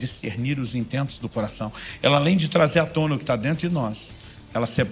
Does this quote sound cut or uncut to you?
uncut